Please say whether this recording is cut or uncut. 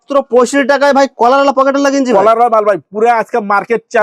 uncut